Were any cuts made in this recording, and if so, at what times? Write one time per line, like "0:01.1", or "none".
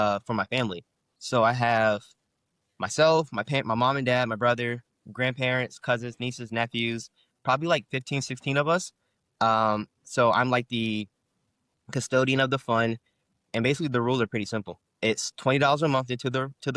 none